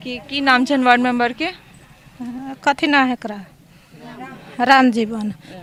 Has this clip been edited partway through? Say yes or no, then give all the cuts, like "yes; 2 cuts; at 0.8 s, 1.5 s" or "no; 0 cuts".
no; 0 cuts